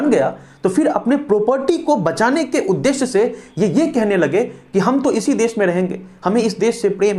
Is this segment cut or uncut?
uncut